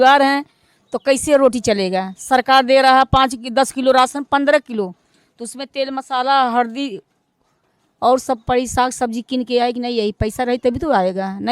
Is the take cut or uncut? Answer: uncut